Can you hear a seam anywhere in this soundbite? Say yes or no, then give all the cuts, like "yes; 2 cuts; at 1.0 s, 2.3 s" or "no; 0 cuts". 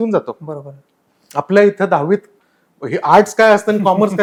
no; 0 cuts